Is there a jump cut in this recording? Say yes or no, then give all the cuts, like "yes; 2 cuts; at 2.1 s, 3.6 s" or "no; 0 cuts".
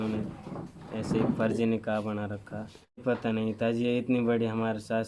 yes; 1 cut; at 3.0 s